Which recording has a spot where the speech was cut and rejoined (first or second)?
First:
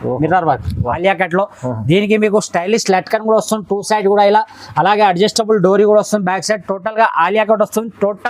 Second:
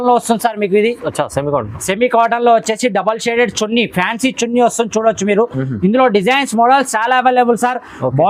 first